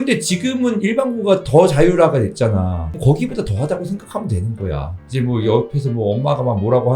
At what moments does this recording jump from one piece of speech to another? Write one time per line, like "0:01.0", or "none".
0:05.0